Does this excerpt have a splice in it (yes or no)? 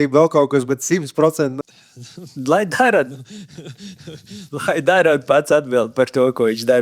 yes